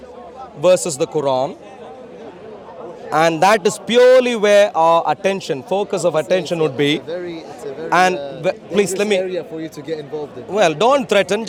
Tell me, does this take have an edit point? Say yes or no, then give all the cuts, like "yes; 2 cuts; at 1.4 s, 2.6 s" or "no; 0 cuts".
no; 0 cuts